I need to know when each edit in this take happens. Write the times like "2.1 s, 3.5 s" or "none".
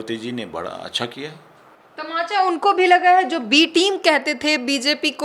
none